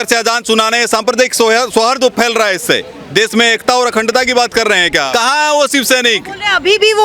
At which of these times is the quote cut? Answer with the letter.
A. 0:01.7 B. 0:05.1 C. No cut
B